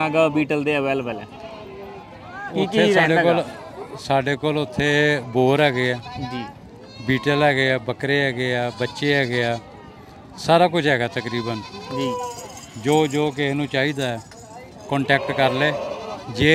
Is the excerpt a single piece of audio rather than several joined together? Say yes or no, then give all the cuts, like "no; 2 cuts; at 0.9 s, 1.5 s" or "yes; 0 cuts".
yes; 0 cuts